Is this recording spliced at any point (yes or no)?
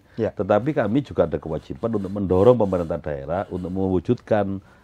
no